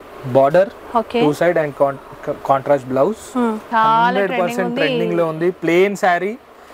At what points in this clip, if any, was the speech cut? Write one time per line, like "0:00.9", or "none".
0:03.6